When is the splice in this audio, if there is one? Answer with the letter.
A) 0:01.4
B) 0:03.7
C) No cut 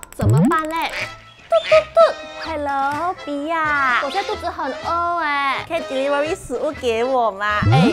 C